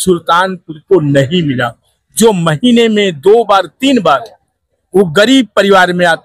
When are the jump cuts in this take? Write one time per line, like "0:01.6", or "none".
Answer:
none